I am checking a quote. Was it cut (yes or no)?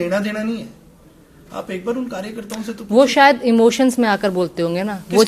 no